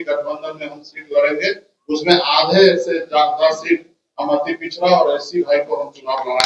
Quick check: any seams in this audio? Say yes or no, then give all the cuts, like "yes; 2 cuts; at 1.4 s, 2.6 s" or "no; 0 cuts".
no; 0 cuts